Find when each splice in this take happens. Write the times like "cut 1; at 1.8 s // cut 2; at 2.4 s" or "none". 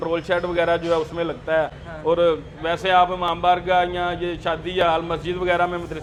none